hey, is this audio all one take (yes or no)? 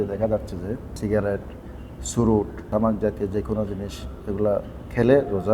no